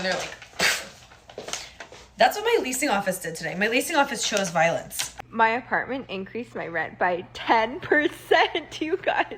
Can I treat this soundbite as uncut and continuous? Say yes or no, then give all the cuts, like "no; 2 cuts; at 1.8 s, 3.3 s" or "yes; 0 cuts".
no; 1 cut; at 5.0 s